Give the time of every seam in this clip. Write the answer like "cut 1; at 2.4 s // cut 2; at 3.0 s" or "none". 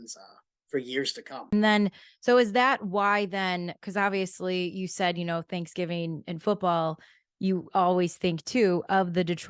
cut 1; at 1.5 s